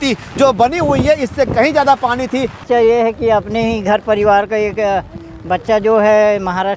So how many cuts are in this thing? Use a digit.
1